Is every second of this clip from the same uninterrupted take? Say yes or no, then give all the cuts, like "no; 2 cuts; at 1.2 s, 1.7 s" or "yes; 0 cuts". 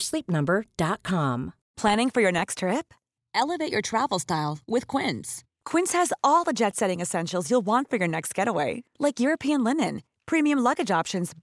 no; 1 cut; at 1.6 s